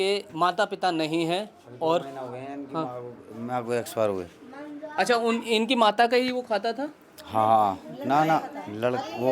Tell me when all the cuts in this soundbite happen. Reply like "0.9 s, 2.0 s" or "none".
none